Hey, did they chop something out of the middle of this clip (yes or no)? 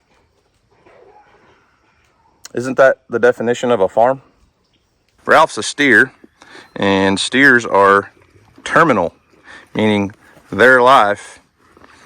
yes